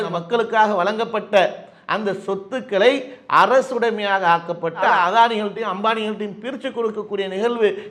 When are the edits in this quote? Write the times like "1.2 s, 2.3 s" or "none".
none